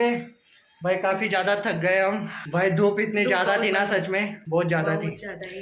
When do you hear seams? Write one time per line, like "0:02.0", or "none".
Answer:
none